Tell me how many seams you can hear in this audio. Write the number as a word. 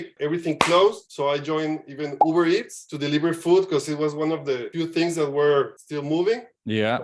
one